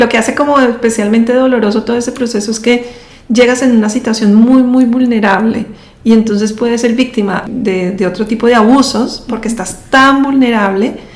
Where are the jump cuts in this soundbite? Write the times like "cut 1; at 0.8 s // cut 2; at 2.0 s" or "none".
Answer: cut 1; at 7.4 s